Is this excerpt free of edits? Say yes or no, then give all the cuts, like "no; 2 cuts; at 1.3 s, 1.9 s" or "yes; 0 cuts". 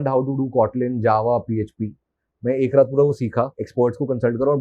no; 1 cut; at 3.6 s